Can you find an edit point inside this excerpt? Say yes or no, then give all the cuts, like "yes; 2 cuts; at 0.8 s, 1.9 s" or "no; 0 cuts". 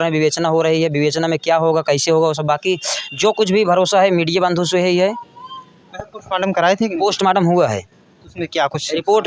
no; 0 cuts